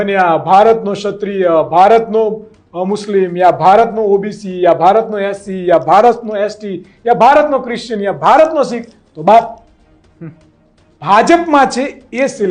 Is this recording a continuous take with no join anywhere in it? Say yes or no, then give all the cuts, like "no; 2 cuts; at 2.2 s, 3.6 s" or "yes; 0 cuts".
yes; 0 cuts